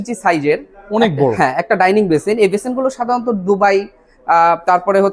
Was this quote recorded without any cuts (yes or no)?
yes